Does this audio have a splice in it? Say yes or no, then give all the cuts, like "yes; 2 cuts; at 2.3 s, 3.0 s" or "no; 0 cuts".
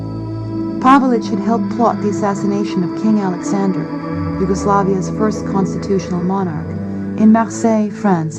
yes; 1 cut; at 1.5 s